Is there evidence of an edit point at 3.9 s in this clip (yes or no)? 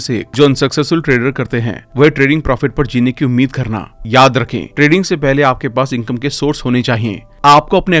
no